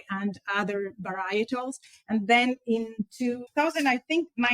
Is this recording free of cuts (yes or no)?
no